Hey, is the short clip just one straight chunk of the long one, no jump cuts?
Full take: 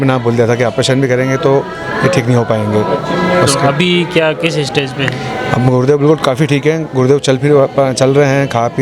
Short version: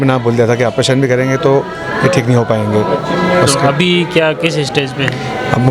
yes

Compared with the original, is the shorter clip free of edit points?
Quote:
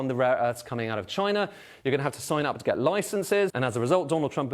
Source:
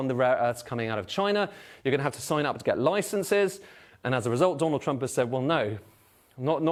no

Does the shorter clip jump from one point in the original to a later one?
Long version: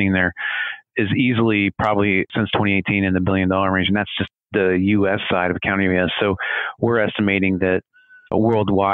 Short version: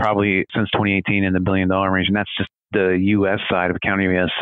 no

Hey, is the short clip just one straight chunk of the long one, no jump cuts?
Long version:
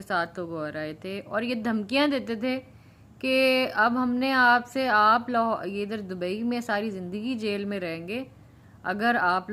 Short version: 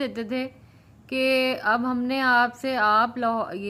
yes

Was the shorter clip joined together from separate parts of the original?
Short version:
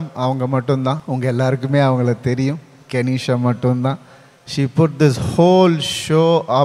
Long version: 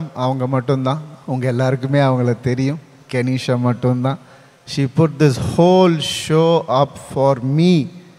yes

